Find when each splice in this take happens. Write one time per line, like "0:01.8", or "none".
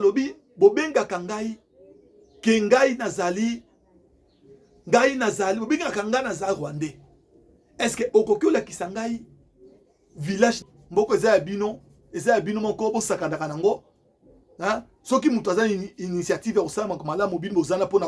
0:10.7